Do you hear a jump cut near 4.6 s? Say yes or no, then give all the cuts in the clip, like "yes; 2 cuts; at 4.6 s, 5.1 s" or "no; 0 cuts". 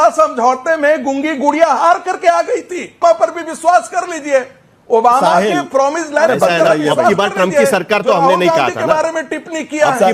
no; 1 cut; at 3.0 s